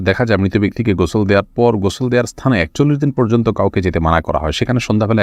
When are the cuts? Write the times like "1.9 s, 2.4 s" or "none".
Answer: none